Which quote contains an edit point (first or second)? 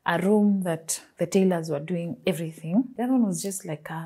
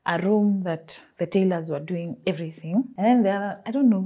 first